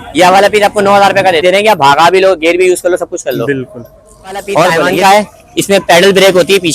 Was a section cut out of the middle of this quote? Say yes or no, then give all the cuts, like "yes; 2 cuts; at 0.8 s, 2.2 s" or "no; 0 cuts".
yes; 2 cuts; at 1.4 s, 4.9 s